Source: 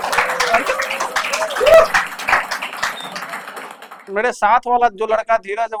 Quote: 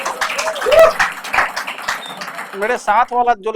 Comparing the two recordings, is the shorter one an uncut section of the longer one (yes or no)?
no